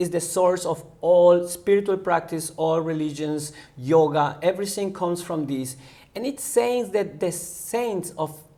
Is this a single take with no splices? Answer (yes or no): yes